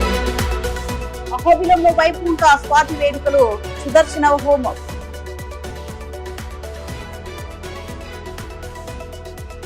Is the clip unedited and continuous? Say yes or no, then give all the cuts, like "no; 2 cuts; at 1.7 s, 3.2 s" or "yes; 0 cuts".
yes; 0 cuts